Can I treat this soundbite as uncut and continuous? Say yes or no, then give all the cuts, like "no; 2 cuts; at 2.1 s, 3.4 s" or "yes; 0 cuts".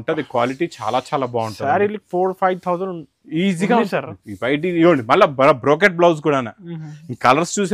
yes; 0 cuts